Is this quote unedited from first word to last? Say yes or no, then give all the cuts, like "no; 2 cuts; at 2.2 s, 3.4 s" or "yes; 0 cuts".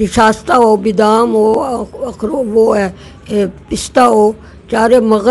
yes; 0 cuts